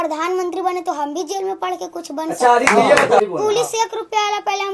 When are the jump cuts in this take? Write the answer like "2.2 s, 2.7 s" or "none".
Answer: 3.2 s

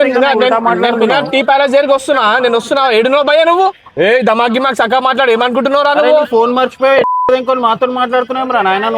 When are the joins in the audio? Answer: 3.9 s

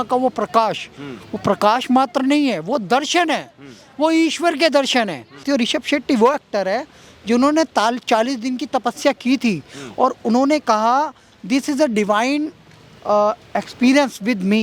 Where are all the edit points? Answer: 5.4 s

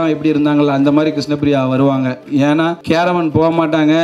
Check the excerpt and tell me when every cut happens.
2.8 s

